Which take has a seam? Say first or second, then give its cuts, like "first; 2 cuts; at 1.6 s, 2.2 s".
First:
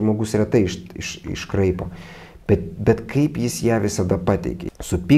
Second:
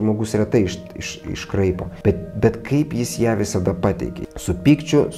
second; 1 cut; at 1.9 s